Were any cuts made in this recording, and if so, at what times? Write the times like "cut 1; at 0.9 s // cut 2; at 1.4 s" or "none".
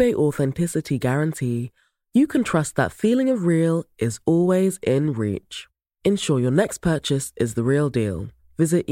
none

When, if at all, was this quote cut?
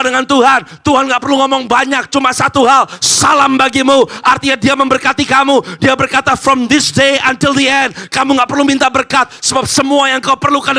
none

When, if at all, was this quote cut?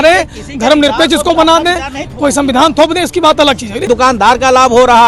cut 1; at 3.9 s

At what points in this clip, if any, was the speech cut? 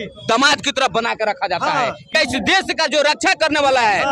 cut 1; at 2.1 s

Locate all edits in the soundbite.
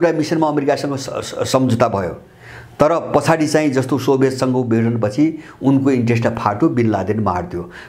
none

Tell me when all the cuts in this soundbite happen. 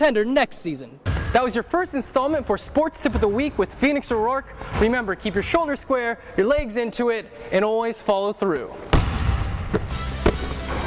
cut 1; at 1.2 s

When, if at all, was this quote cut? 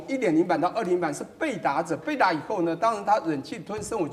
none

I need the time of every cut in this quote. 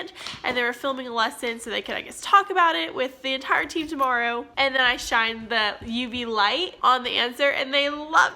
cut 1; at 4.5 s

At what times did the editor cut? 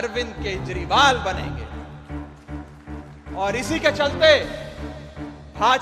cut 1; at 1.6 s // cut 2; at 3.2 s

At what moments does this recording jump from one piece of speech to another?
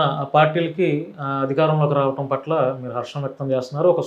none

